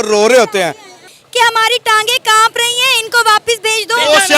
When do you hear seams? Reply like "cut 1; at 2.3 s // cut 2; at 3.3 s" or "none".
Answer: cut 1; at 1.1 s

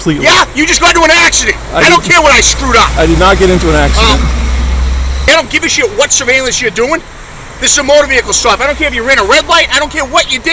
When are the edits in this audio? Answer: cut 1; at 5.3 s

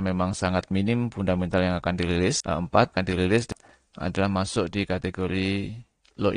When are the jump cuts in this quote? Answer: cut 1; at 2.4 s

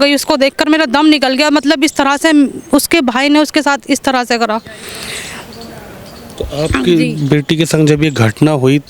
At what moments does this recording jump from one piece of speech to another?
none

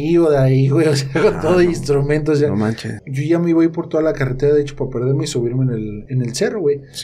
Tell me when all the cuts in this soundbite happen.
cut 1; at 2.9 s

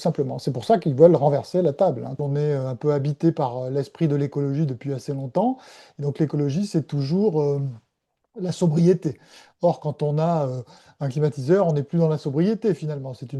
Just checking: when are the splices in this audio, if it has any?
cut 1; at 2.1 s

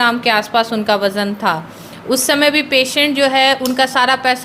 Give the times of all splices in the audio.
none

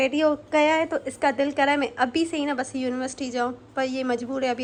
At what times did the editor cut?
none

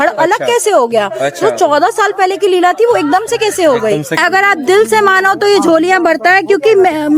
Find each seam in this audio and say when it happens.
cut 1; at 4.2 s

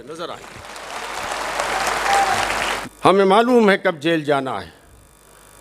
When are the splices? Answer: cut 1; at 2.8 s

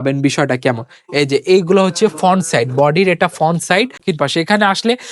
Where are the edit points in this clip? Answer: cut 1; at 4.0 s

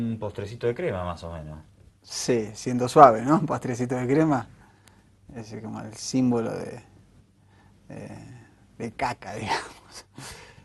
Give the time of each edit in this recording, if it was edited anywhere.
cut 1; at 4.9 s

